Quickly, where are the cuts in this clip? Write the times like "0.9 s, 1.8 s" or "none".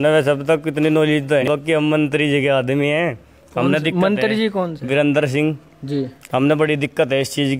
1.4 s